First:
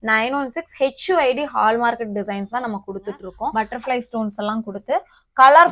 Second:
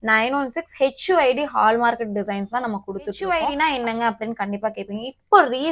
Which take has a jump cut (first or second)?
first